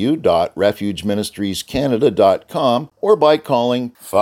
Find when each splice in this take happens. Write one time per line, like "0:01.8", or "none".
0:02.9